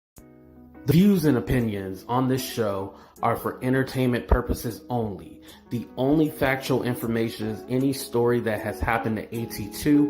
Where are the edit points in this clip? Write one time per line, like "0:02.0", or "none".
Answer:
0:00.9